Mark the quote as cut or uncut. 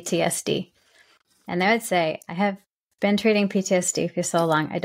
uncut